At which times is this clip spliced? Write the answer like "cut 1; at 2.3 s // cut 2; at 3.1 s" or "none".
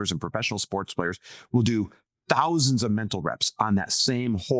none